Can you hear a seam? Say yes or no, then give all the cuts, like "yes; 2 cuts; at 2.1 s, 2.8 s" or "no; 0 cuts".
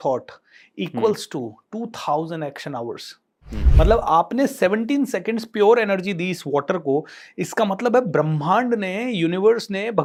no; 0 cuts